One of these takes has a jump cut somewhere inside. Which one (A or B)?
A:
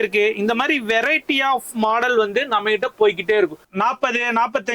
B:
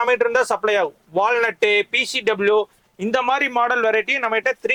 A